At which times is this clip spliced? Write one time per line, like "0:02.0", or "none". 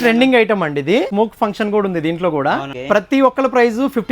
0:01.1
0:02.7